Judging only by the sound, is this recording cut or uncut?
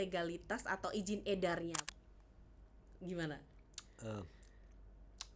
cut